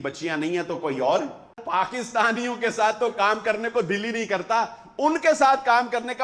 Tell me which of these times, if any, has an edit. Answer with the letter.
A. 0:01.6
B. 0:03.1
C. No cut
A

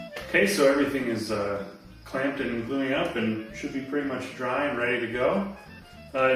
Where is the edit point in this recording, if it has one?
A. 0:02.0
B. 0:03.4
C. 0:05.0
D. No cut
A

